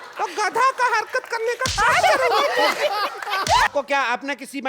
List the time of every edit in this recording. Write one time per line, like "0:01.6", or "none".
0:03.7